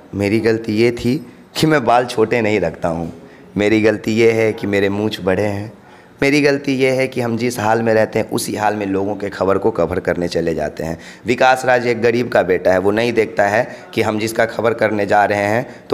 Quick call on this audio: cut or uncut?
uncut